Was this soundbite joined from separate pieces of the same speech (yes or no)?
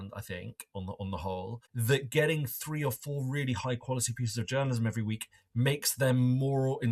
yes